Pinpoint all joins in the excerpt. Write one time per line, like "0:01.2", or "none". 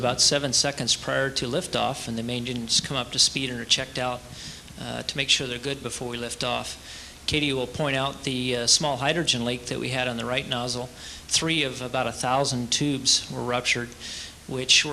0:13.3